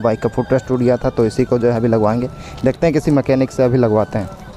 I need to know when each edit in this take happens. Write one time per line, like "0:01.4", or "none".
none